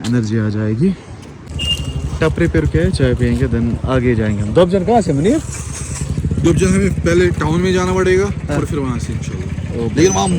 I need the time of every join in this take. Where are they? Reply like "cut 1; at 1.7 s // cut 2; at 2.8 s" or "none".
cut 1; at 1.5 s